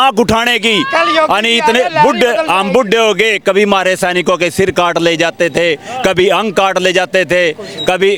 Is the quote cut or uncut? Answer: uncut